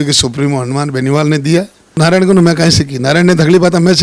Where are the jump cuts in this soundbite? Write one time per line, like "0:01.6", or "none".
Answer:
0:01.9